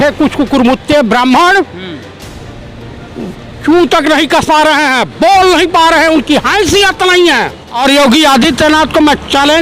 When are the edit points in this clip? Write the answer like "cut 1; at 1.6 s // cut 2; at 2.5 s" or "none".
cut 1; at 7.6 s